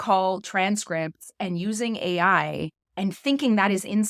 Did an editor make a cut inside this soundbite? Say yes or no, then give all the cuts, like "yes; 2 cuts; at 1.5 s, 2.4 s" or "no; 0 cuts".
no; 0 cuts